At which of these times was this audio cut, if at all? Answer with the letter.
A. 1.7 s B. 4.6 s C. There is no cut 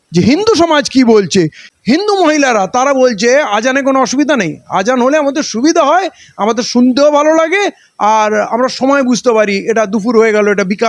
A